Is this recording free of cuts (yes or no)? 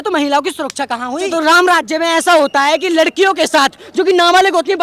no